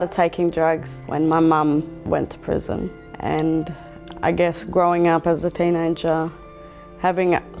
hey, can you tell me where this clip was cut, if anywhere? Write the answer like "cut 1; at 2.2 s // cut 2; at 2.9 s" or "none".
cut 1; at 1.0 s // cut 2; at 2.0 s // cut 3; at 3.0 s

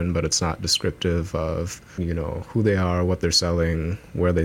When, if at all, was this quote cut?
cut 1; at 1.8 s

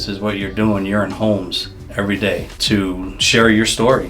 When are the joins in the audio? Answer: cut 1; at 2.5 s

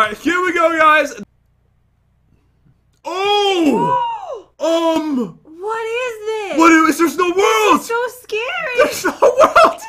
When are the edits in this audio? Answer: cut 1; at 1.2 s

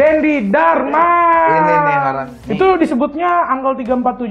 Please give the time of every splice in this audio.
cut 1; at 2.3 s

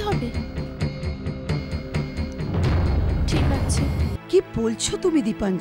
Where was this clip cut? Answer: cut 1; at 4.1 s

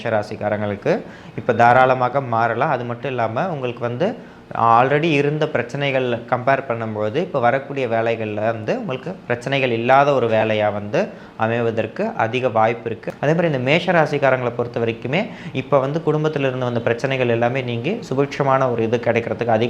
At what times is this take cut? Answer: cut 1; at 13.0 s

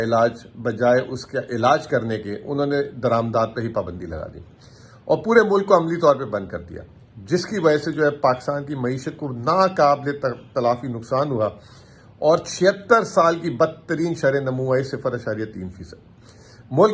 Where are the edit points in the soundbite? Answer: none

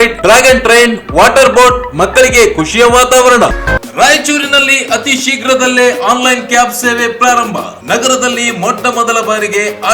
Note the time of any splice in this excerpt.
cut 1; at 3.6 s

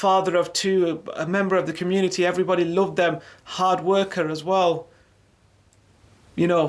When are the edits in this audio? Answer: none

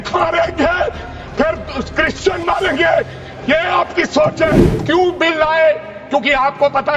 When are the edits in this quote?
cut 1; at 4.7 s

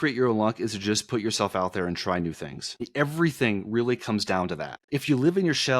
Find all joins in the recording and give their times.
cut 1; at 2.9 s // cut 2; at 4.7 s

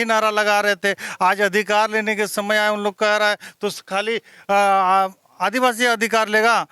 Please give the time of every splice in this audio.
none

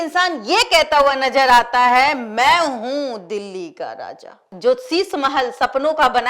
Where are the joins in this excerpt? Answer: cut 1; at 4.5 s

